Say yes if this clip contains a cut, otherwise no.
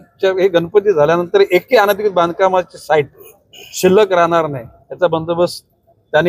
no